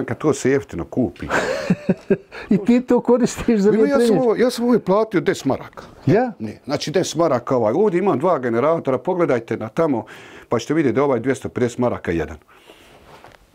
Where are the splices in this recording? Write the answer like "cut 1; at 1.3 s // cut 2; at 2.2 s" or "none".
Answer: none